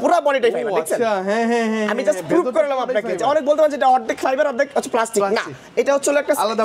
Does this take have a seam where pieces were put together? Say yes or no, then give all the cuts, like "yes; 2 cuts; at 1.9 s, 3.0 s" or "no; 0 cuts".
no; 0 cuts